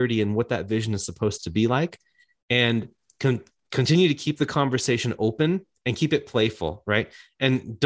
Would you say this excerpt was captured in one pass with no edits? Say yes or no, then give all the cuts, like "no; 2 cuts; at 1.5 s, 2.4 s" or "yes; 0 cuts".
yes; 0 cuts